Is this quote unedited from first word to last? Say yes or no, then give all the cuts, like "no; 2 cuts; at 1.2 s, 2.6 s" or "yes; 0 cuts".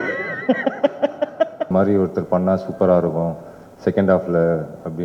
no; 1 cut; at 1.7 s